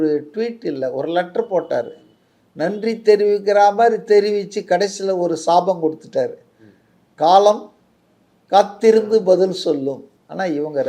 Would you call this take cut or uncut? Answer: uncut